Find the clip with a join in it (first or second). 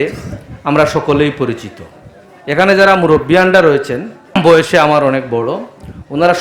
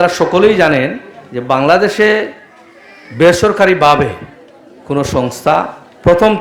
first